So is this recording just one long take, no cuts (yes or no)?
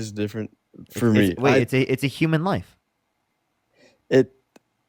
yes